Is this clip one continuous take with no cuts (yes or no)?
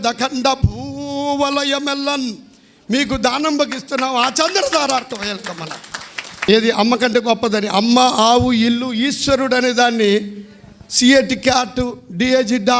no